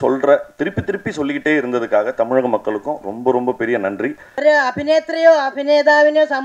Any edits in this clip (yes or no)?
yes